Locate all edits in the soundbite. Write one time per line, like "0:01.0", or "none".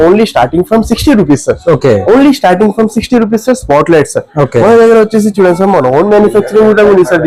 none